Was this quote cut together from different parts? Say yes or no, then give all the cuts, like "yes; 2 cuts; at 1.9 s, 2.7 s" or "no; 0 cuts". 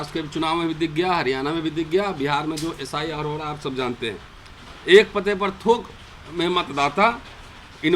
no; 0 cuts